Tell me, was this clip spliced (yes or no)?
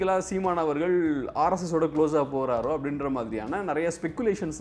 no